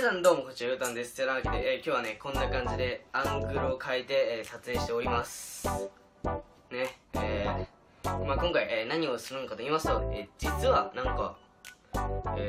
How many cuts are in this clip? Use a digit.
0